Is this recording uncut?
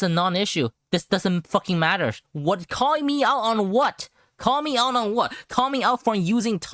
yes; 0 cuts

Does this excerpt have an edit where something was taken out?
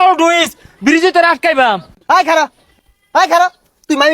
yes; 1 cut; at 1.9 s

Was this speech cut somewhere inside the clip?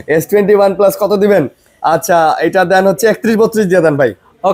no; 0 cuts

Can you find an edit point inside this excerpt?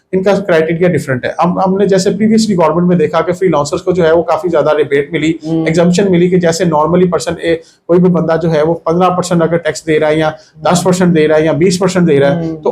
no; 0 cuts

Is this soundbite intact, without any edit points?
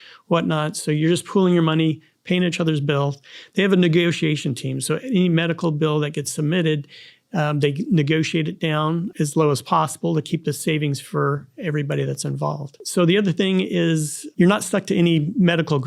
yes; 0 cuts

